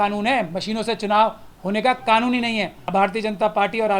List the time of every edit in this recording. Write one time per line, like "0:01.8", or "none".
0:02.9